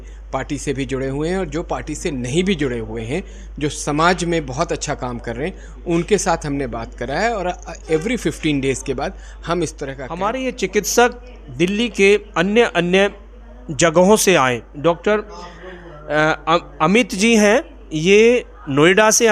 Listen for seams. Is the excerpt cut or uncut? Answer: cut